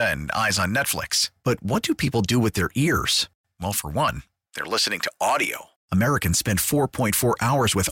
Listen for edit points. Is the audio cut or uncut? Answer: uncut